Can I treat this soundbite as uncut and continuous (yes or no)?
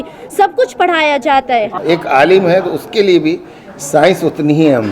no